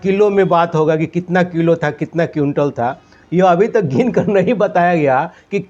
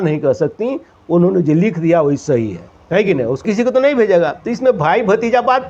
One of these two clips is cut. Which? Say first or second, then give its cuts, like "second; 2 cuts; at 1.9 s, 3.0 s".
second; 1 cut; at 3.4 s